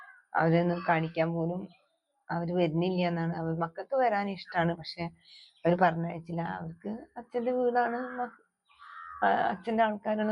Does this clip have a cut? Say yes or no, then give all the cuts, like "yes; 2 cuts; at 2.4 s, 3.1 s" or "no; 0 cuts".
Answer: no; 0 cuts